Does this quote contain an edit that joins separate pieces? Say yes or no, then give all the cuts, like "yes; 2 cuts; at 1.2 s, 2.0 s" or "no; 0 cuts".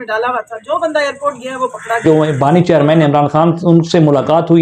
yes; 1 cut; at 2.0 s